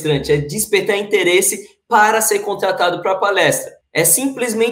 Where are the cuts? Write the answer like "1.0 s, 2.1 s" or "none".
3.7 s